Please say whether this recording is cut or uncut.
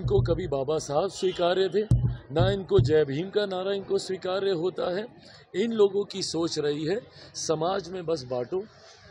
uncut